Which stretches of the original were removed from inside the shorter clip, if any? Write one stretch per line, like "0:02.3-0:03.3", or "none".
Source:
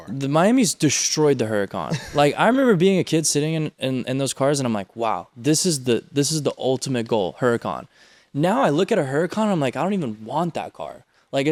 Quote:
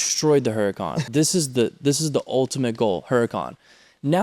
0:01.9-0:05.3